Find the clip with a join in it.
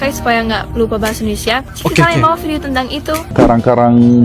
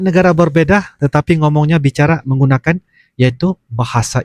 first; 1 cut; at 3.3 s

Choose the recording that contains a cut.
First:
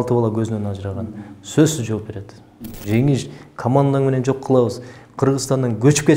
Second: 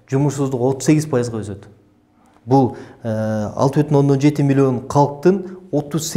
first; 1 cut; at 2.6 s

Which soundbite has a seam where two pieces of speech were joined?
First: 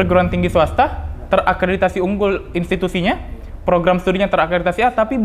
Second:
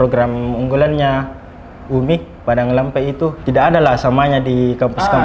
second; 1 cut; at 3.4 s

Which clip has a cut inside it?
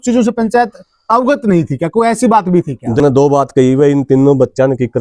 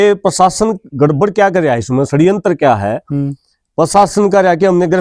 first; 1 cut; at 3.0 s

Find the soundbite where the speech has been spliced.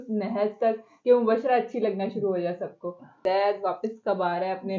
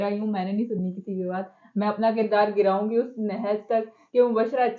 first; 1 cut; at 3.2 s

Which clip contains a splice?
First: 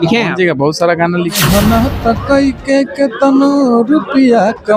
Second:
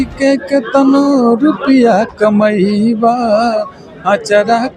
first; 1 cut; at 1.4 s

